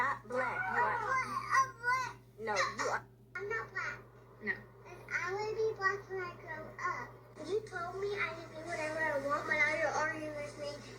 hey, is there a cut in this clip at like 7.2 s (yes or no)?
yes